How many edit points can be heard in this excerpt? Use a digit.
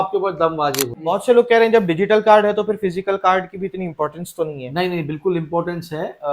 1